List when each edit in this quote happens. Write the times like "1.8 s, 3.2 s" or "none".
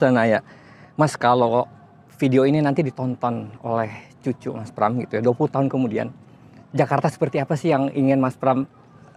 none